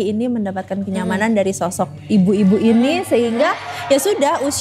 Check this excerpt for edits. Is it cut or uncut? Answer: uncut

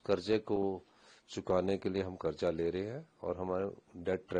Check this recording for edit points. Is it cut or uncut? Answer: uncut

